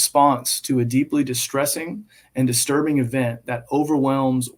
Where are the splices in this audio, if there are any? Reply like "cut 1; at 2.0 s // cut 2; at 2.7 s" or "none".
none